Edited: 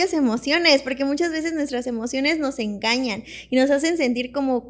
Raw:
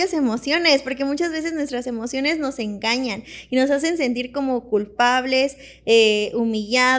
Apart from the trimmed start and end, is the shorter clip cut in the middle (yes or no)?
no